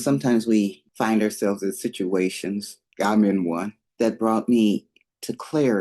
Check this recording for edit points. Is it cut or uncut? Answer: cut